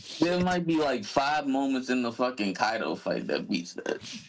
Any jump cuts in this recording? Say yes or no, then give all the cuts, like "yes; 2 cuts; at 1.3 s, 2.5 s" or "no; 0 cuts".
no; 0 cuts